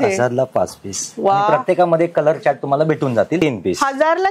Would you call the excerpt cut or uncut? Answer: cut